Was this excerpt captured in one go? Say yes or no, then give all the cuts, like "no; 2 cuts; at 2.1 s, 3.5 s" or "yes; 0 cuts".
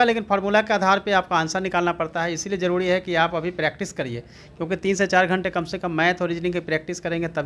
yes; 0 cuts